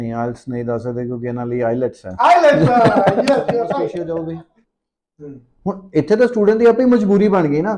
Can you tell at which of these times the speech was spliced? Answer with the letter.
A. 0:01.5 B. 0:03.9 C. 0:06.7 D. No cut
B